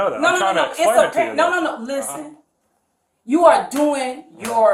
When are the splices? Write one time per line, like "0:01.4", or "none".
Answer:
none